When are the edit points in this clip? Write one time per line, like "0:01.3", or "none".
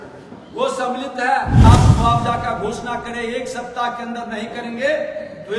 0:01.6